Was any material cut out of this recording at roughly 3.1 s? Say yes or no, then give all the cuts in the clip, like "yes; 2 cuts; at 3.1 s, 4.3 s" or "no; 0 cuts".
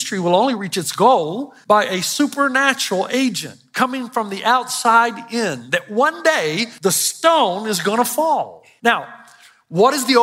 no; 3 cuts; at 1.5 s, 6.7 s, 8.6 s